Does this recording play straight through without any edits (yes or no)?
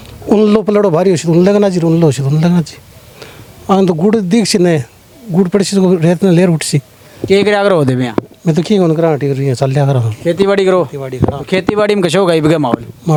yes